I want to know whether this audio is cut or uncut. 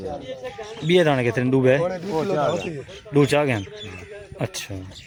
uncut